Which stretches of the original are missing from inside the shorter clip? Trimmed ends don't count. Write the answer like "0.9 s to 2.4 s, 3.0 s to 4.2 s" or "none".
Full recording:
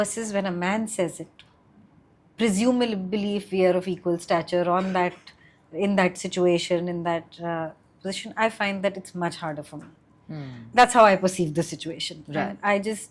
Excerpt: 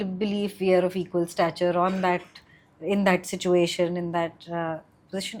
none